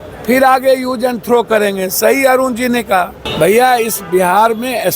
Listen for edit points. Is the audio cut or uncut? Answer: cut